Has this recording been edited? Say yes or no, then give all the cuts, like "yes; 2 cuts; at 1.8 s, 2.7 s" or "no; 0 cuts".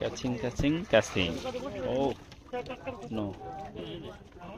no; 0 cuts